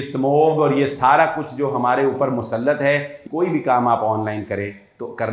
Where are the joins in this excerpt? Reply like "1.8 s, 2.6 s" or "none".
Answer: 3.1 s